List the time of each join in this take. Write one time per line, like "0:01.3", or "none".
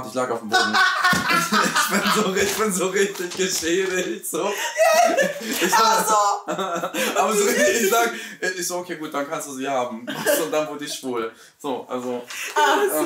none